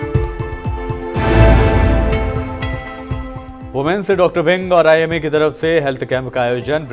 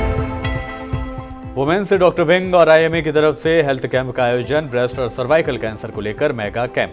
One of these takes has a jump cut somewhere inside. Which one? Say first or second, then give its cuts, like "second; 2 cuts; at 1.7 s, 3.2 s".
first; 1 cut; at 1.1 s